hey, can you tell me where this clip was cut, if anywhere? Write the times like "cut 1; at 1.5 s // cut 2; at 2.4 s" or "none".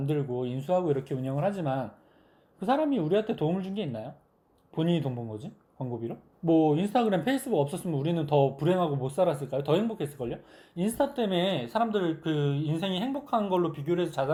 none